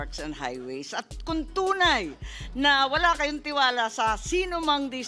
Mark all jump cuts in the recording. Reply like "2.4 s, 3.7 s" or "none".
none